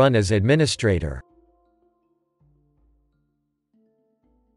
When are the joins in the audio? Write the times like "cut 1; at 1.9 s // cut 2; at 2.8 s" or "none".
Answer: none